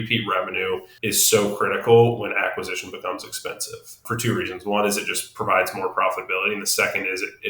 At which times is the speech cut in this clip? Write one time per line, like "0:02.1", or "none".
0:00.9
0:04.0